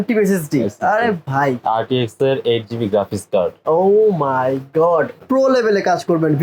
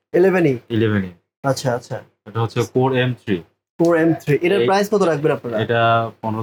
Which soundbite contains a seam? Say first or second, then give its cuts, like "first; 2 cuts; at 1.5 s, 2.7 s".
first; 1 cut; at 5.1 s